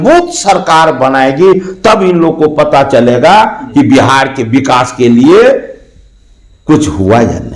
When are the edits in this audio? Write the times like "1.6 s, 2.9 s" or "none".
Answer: none

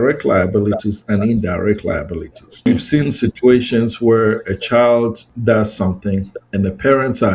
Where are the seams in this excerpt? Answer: 2.7 s, 5.3 s, 6.4 s

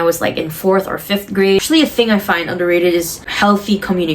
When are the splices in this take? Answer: 1.6 s, 3.2 s

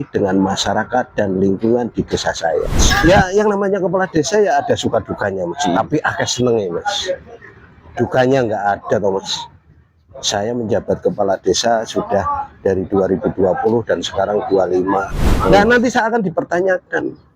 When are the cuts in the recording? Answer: 2.8 s, 15.5 s

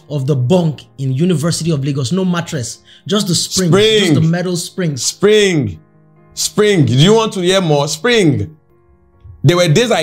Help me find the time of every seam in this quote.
none

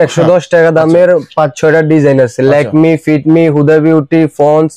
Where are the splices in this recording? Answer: none

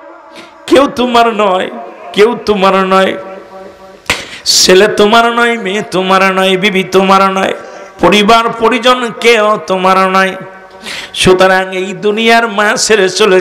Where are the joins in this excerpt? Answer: none

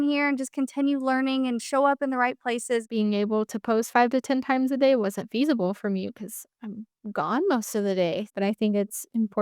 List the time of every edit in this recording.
2.9 s, 8.3 s

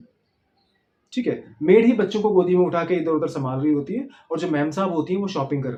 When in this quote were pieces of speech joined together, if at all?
none

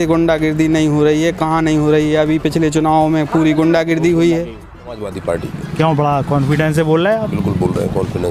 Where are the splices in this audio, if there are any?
5.0 s

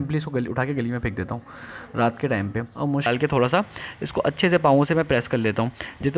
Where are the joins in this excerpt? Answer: 3.1 s

